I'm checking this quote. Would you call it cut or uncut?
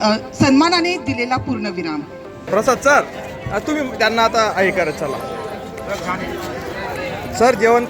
cut